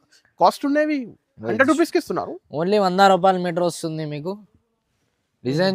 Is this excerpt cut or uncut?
uncut